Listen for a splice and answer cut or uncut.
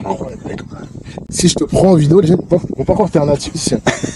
uncut